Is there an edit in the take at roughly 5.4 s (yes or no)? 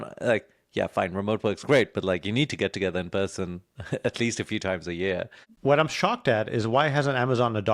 yes